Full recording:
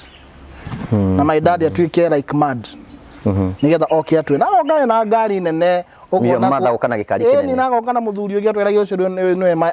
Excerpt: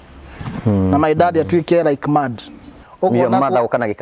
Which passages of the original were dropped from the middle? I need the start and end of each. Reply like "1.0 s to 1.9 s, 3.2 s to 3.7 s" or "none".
3.1 s to 5.9 s